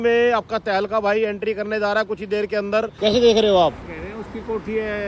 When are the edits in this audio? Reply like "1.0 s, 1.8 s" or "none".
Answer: 2.9 s, 3.9 s